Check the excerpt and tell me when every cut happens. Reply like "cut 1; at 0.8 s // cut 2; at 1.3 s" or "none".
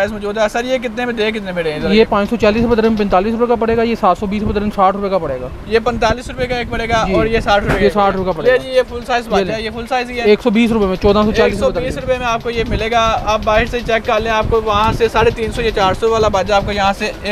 none